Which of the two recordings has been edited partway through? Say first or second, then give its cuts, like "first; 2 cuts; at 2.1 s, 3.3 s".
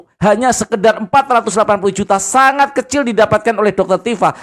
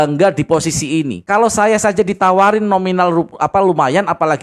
second; 1 cut; at 1.2 s